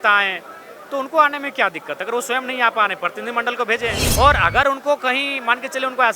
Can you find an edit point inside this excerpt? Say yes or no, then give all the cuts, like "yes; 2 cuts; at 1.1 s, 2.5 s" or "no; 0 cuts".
yes; 1 cut; at 4.0 s